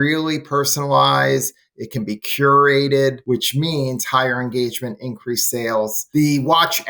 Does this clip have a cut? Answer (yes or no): yes